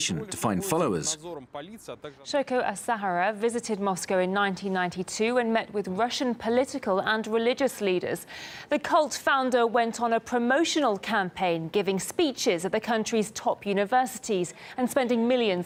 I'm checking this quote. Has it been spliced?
no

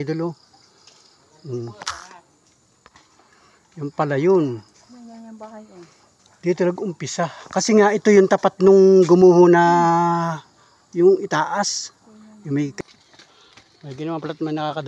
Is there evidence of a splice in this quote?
yes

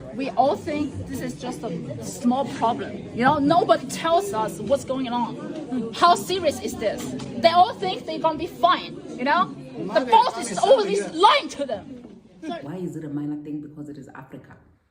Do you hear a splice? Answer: yes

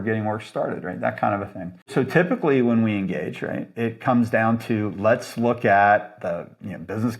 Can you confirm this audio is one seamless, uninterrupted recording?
no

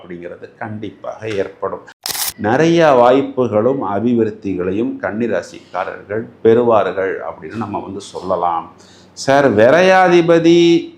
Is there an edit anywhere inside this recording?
yes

